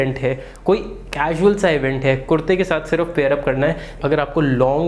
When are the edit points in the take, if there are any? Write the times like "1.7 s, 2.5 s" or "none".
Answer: 4.0 s